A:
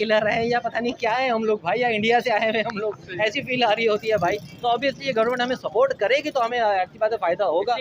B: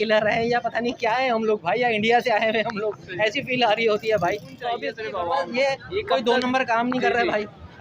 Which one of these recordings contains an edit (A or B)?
B